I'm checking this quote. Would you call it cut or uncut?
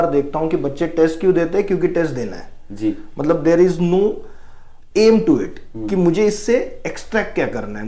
uncut